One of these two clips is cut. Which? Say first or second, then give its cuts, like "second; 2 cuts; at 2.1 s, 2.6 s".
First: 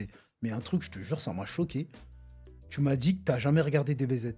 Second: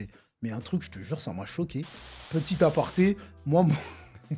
second; 1 cut; at 2.2 s